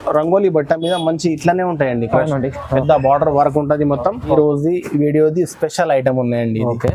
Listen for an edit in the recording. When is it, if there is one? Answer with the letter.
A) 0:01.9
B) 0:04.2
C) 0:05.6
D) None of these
B